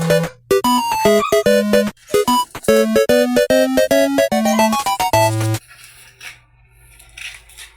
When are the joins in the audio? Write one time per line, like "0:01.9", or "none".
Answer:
0:05.6